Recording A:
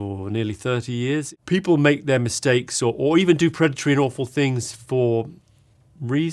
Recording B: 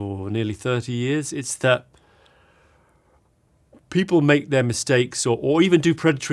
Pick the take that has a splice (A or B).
A